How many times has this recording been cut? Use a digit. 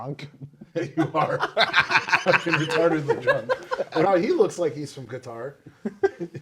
1